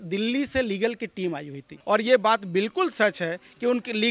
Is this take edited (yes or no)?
yes